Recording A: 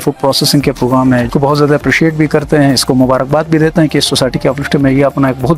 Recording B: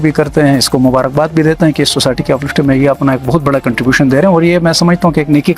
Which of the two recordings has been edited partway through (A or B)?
A